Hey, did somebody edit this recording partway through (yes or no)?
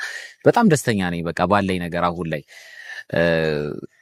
no